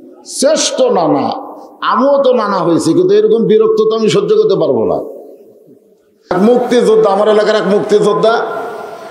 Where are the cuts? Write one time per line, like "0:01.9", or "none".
0:06.3